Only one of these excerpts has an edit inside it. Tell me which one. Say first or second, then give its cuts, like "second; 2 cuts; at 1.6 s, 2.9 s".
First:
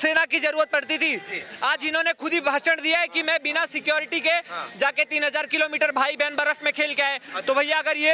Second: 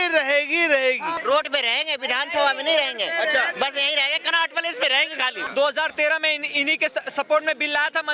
second; 2 cuts; at 1.1 s, 5.4 s